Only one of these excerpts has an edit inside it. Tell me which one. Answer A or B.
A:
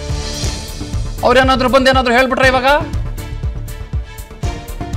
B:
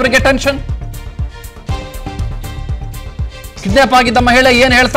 A